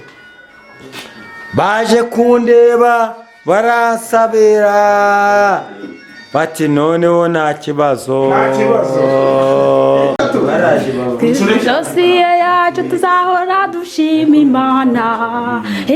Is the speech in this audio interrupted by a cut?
yes; 1 cut; at 10.2 s

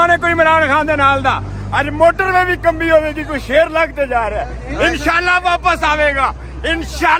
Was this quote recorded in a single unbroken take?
yes; 0 cuts

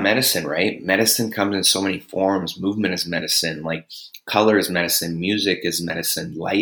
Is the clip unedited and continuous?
yes; 0 cuts

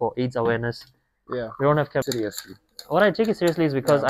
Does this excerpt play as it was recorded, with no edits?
no; 1 cut; at 2.1 s

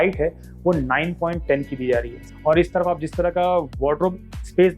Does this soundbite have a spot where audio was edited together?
yes; 1 cut; at 2.2 s

